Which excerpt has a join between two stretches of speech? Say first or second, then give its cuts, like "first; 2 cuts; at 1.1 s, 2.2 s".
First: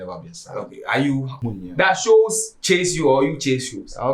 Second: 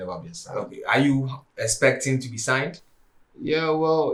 first; 1 cut; at 1.4 s